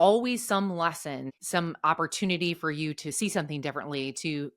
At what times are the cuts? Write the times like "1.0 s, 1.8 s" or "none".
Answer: 1.3 s